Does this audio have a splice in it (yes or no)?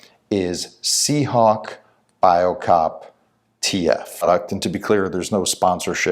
yes